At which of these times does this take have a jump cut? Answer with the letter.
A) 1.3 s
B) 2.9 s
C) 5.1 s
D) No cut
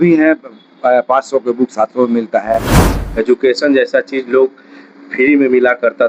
B